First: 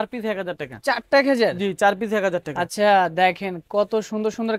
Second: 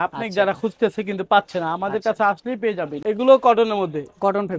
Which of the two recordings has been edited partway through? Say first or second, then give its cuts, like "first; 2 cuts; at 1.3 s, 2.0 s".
second; 1 cut; at 2.9 s